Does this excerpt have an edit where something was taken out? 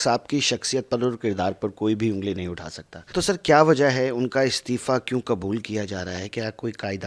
no; 0 cuts

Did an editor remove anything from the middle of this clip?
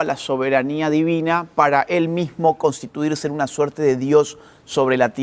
no; 0 cuts

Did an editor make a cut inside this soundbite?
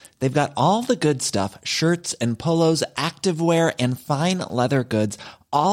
no; 0 cuts

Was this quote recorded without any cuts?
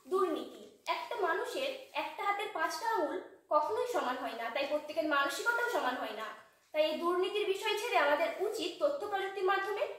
yes; 0 cuts

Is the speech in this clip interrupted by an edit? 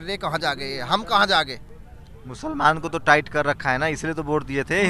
no; 0 cuts

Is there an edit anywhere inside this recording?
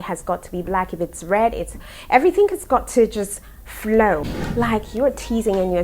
yes; 1 cut; at 4.4 s

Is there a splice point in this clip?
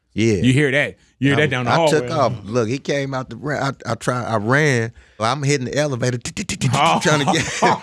yes; 1 cut; at 5.2 s

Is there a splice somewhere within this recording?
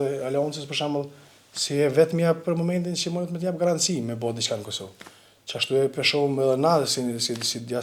no; 0 cuts

